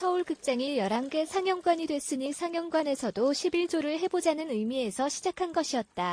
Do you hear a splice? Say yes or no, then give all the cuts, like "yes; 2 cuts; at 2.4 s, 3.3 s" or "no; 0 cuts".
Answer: no; 0 cuts